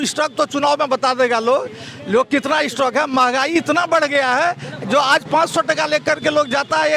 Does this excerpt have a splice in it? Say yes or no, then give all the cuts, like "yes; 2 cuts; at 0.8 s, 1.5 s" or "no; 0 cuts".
no; 0 cuts